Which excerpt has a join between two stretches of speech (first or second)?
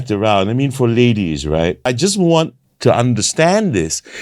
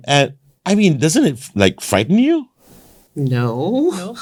first